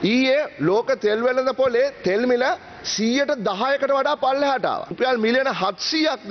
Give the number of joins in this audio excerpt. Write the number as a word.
one